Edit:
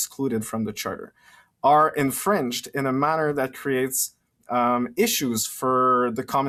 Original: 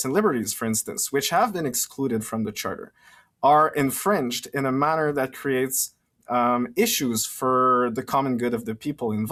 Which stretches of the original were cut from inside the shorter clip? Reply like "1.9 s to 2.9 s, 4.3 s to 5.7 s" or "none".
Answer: none

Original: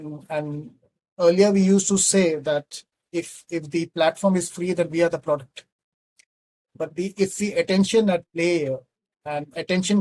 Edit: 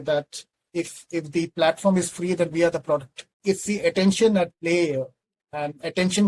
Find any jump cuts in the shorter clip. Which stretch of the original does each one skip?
5.8 s to 7.1 s

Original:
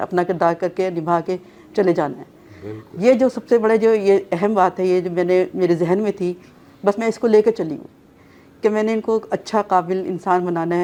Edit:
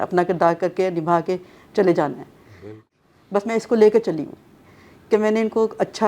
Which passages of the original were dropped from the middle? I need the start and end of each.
2.9 s to 6.4 s

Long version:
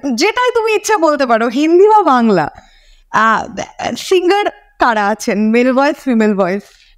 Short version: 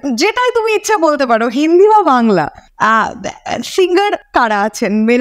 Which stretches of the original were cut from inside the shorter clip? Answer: 2.6 s to 3.0 s, 4.6 s to 4.7 s

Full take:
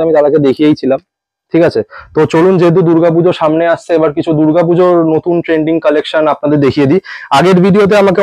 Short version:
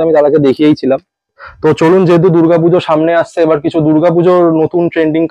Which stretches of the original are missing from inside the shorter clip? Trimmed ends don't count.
1.4 s to 1.9 s

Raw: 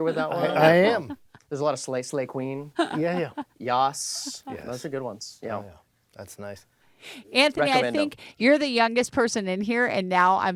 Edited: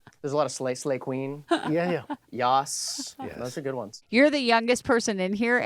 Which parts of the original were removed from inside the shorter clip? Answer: 5.2 s to 8.2 s

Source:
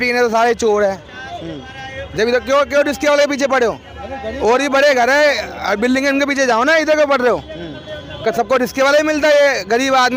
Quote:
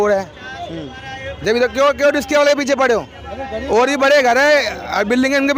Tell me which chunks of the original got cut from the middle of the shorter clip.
none

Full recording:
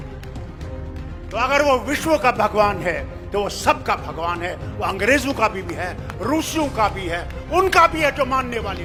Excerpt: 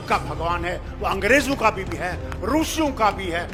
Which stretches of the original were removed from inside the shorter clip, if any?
none

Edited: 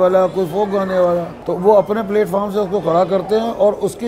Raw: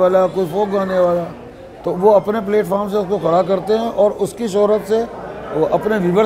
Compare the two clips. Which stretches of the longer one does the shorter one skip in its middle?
1.4 s to 1.8 s

